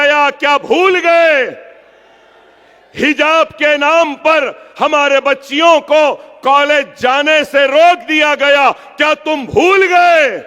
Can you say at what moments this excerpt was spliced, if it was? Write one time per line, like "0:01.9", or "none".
none